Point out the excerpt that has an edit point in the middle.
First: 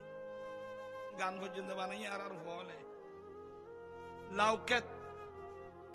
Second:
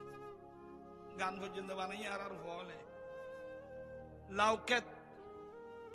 second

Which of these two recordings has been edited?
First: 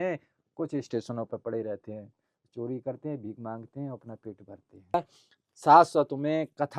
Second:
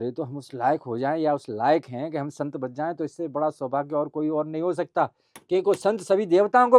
first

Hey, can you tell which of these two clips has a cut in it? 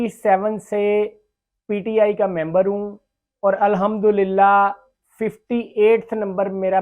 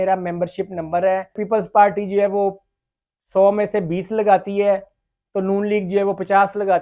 second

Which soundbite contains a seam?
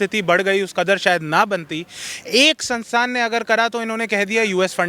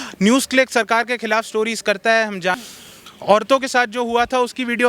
second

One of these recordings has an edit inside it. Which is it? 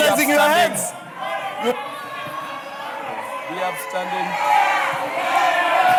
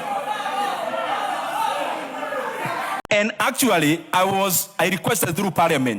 second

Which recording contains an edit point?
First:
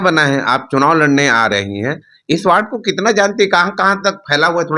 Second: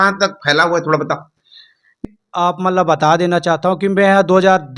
second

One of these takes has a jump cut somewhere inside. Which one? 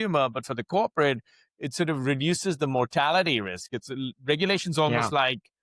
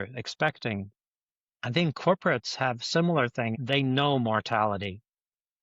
second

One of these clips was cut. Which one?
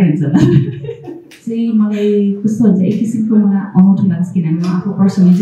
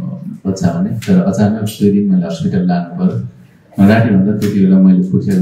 first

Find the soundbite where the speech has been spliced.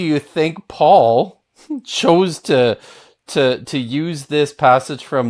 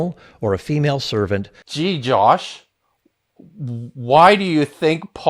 second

